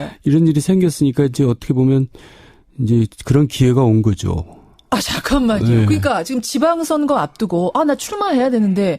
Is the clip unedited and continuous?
yes; 0 cuts

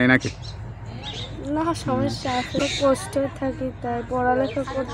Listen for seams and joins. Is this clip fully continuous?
no; 1 cut; at 2.6 s

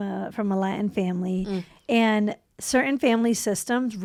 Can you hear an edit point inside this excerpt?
no; 0 cuts

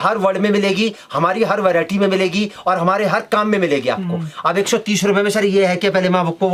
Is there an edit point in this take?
no; 0 cuts

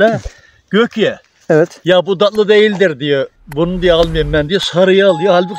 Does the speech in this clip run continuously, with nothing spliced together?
yes; 0 cuts

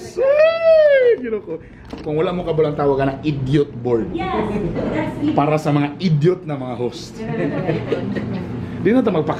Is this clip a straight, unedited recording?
yes; 0 cuts

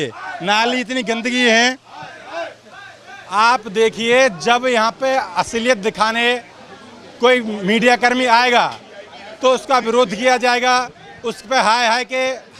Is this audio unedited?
yes; 0 cuts

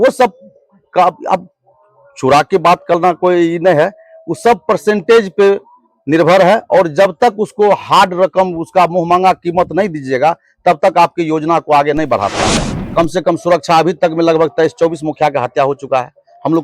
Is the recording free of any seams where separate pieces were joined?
no; 1 cut; at 12.7 s

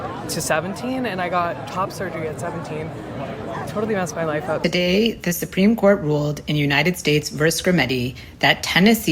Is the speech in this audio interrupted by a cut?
yes; 1 cut; at 4.6 s

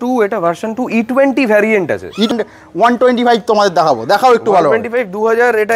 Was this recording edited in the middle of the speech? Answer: yes; 1 cut; at 2.3 s

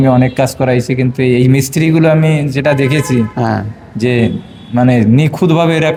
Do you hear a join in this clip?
no; 0 cuts

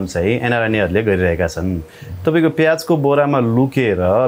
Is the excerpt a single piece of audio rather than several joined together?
yes; 0 cuts

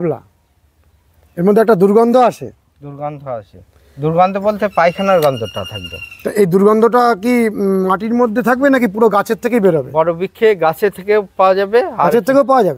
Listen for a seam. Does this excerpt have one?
no; 0 cuts

